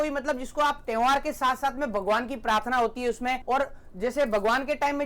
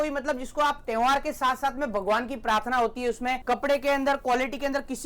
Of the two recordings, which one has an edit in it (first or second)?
second